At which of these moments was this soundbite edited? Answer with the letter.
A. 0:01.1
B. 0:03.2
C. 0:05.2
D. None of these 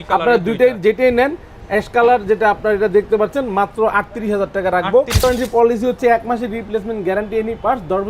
C